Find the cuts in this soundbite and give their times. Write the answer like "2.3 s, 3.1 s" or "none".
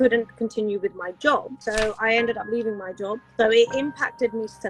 1.5 s, 3.2 s